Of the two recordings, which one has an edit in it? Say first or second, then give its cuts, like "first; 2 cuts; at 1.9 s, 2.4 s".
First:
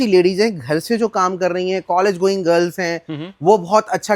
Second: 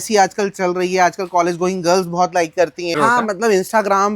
second; 1 cut; at 3.0 s